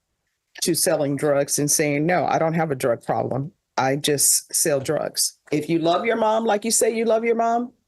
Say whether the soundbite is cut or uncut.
cut